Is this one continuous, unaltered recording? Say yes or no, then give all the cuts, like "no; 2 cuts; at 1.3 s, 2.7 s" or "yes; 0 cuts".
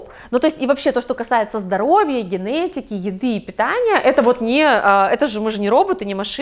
yes; 0 cuts